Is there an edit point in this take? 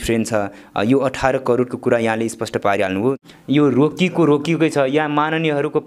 yes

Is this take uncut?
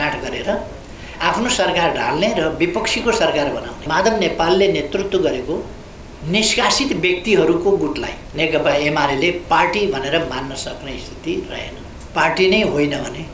no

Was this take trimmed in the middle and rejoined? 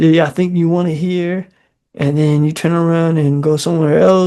no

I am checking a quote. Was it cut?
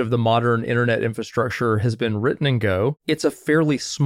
yes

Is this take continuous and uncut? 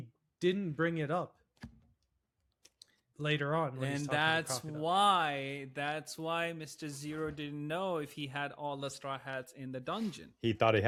yes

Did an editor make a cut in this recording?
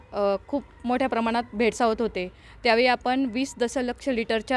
no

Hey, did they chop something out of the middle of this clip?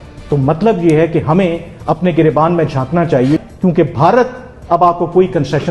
yes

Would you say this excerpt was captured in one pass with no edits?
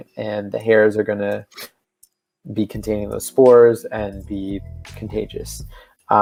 yes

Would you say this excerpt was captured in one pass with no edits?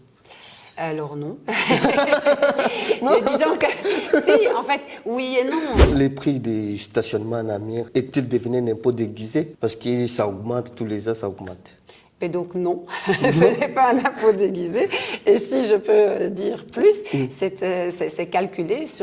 no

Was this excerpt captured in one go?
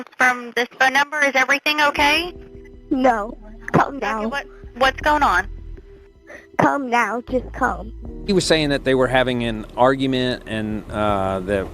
no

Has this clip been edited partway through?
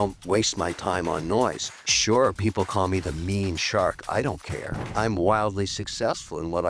no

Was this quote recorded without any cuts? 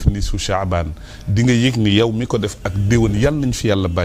yes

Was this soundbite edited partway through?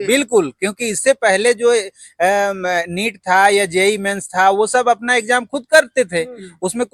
no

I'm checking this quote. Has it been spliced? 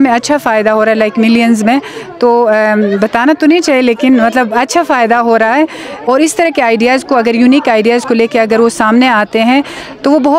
yes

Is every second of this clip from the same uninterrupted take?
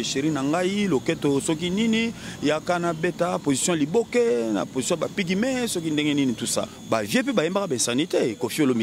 no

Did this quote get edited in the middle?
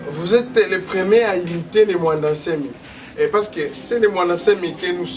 no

